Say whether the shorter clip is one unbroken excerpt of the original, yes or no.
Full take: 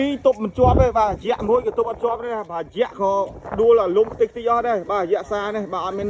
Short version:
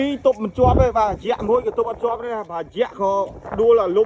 yes